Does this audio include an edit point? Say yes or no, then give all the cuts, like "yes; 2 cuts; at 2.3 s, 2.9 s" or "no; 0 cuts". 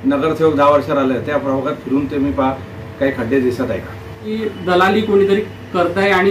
yes; 1 cut; at 4.3 s